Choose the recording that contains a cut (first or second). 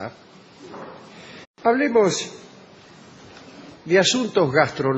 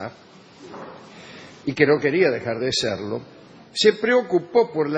second